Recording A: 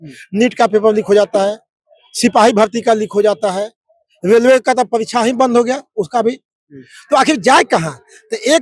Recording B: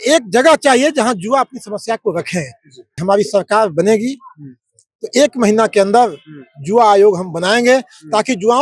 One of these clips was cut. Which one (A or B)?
B